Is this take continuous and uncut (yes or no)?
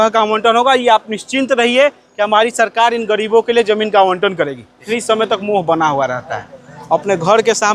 no